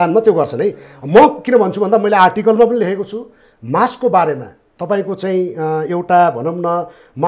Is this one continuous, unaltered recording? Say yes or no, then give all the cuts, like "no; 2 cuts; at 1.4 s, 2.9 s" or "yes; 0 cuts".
yes; 0 cuts